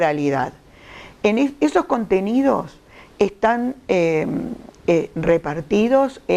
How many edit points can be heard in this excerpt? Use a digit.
1